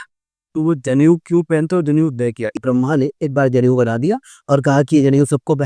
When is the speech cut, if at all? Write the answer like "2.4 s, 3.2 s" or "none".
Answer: 2.6 s